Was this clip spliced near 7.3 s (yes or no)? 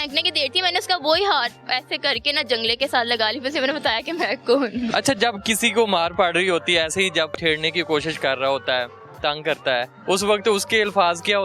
yes